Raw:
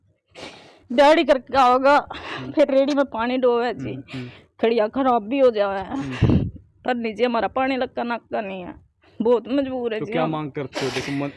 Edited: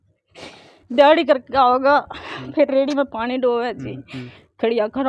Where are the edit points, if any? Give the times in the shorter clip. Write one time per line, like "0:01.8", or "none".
none